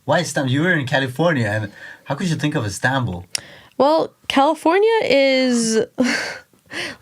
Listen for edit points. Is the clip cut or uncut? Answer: uncut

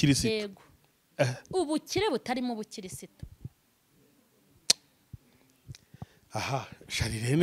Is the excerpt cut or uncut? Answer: uncut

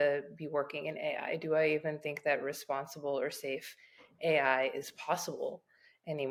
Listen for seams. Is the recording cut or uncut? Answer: uncut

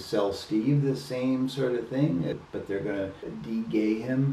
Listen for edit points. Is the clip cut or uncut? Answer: cut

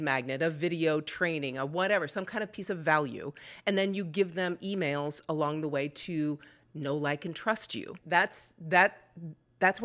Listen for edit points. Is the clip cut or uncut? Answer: cut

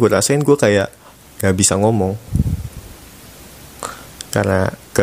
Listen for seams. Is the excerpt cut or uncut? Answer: uncut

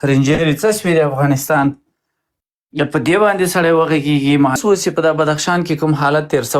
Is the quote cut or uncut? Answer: cut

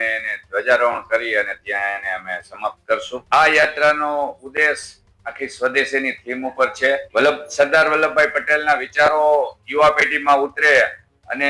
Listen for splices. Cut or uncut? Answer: cut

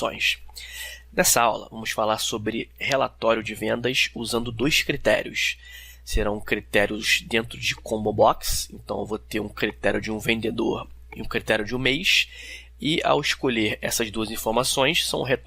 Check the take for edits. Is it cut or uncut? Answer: cut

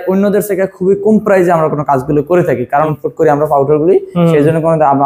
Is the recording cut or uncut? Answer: cut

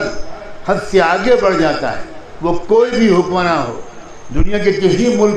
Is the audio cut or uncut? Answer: uncut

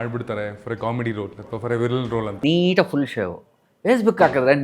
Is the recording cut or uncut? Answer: cut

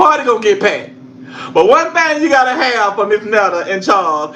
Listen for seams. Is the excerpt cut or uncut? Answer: uncut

